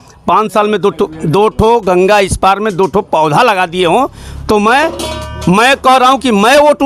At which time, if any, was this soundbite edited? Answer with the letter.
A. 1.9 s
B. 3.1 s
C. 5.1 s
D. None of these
D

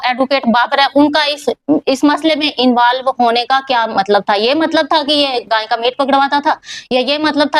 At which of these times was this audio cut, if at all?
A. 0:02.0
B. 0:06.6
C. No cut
C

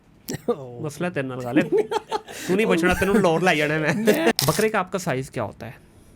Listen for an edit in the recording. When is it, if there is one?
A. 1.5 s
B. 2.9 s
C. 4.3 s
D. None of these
C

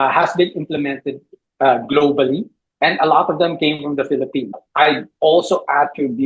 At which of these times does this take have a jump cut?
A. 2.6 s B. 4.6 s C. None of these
B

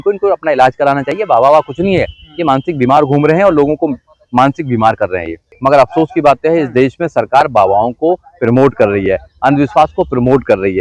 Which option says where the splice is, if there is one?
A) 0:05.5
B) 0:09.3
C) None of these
A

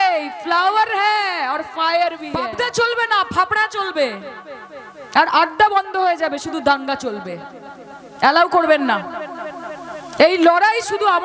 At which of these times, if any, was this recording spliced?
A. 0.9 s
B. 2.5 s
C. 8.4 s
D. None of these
B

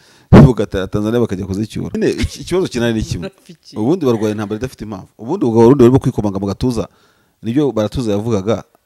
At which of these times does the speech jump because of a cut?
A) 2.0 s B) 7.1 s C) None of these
A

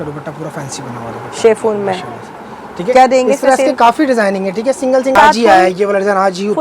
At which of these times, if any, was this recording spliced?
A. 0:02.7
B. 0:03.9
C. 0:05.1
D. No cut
C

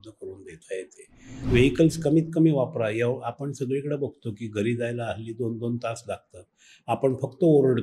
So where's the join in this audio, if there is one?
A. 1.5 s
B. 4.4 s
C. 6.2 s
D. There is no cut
A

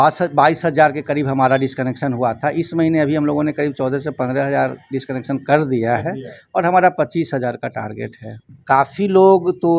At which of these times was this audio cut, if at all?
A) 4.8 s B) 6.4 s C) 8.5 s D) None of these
C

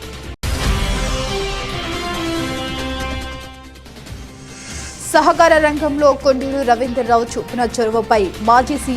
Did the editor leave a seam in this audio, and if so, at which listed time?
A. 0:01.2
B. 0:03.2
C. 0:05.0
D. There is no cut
C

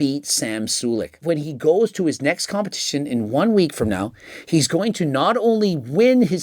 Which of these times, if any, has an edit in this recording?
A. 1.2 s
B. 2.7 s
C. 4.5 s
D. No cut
A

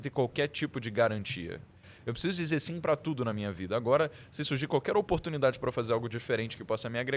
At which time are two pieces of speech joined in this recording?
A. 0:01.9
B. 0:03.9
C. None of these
A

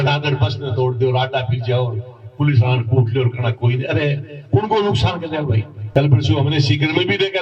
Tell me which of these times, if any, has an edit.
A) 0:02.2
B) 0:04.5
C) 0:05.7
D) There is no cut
C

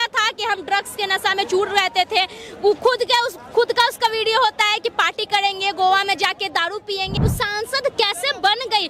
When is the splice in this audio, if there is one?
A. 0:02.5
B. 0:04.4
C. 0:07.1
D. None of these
C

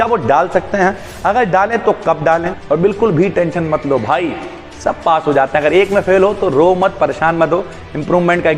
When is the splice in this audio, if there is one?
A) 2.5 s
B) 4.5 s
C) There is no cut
A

